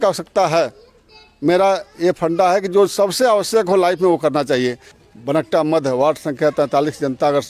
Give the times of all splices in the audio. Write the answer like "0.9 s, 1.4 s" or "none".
5.0 s